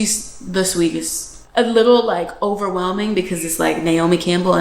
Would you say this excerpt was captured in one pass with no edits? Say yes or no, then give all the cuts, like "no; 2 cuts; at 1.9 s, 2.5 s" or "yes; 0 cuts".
no; 1 cut; at 1.3 s